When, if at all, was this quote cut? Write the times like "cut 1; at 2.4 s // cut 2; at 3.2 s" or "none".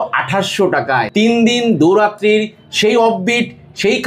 cut 1; at 1.1 s